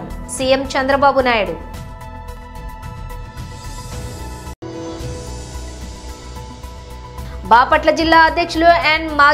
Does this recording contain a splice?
yes; 3 cuts; at 2.2 s, 4.6 s, 6.5 s

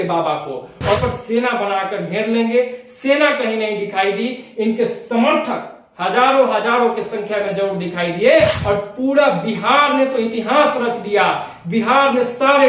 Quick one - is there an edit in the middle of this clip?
yes; 2 cuts; at 1.0 s, 8.6 s

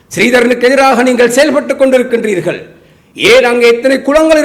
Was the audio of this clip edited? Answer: no; 0 cuts

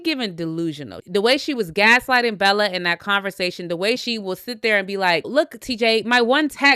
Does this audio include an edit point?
yes; 3 cuts; at 1.0 s, 4.0 s, 5.3 s

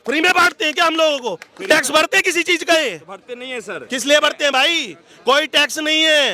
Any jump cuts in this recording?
no; 0 cuts

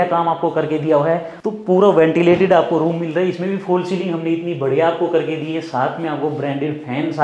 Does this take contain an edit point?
yes; 1 cut; at 1.3 s

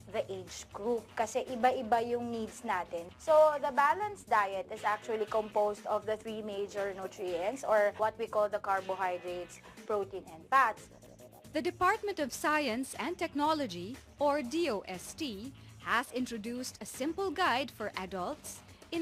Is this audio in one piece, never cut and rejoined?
no; 1 cut; at 10.8 s

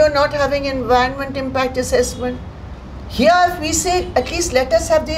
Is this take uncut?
yes; 0 cuts

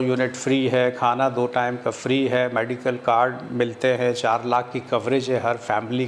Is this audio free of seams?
yes; 0 cuts

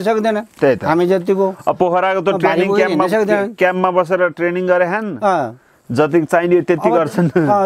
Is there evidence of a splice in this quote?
no; 0 cuts

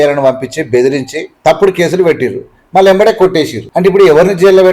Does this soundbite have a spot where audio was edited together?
yes; 2 cuts; at 1.2 s, 3.6 s

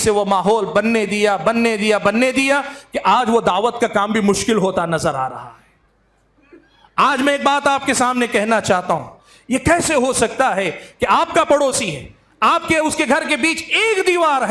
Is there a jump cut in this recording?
no; 0 cuts

